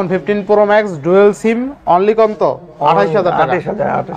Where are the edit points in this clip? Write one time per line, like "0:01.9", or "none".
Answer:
none